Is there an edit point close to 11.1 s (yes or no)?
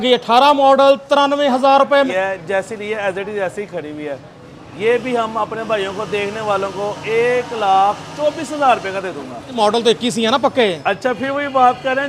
no